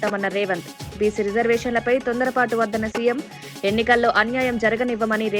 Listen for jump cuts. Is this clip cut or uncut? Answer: uncut